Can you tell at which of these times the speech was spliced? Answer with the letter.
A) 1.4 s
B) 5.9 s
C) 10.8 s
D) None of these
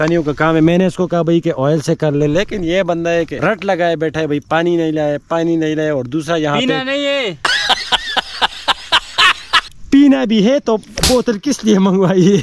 D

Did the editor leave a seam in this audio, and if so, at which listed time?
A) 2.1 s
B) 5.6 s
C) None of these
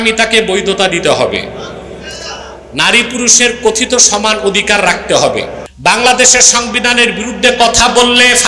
B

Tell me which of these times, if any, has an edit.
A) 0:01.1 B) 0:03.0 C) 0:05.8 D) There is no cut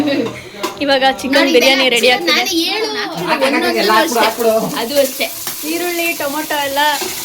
B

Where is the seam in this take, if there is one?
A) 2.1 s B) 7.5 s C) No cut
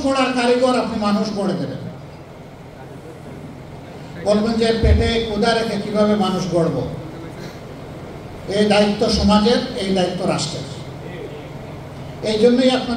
C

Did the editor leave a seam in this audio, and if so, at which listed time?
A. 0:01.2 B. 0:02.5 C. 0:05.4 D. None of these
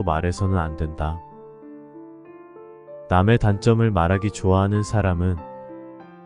C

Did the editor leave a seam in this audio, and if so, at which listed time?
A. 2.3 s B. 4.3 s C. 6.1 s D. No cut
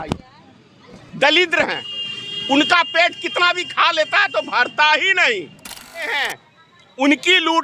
C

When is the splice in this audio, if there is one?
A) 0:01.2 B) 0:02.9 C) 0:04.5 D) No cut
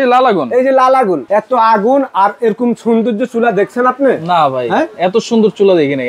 A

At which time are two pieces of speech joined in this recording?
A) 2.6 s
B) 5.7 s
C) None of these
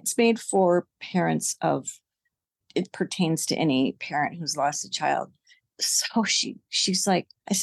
A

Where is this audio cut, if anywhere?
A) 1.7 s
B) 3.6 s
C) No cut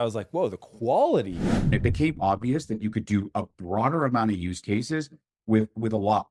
A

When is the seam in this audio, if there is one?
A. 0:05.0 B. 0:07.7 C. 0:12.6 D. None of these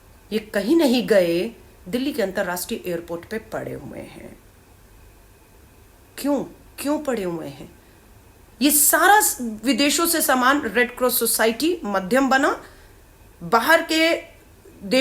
D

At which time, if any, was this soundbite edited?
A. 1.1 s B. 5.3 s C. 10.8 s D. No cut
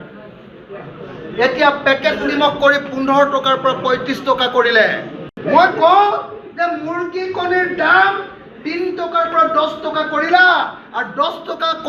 B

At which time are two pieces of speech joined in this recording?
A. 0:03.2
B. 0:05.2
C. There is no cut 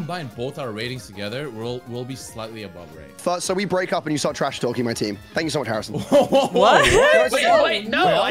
A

